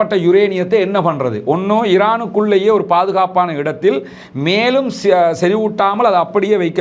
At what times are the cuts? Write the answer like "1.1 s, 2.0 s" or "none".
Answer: none

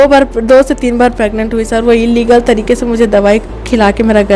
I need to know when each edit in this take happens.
none

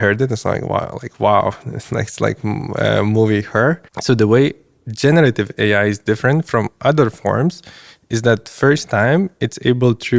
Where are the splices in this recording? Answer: 3.9 s

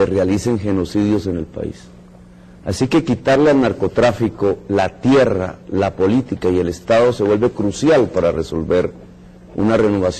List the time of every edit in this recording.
4.4 s

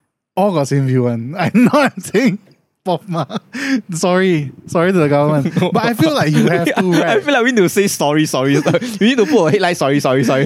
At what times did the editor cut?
none

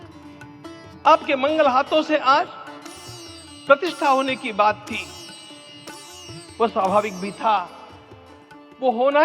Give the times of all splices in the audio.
1.0 s

